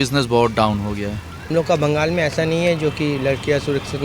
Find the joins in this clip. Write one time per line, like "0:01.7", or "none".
0:01.3